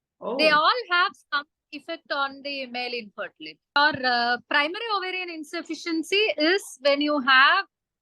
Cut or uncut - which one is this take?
cut